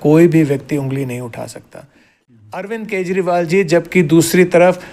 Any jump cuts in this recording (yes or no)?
yes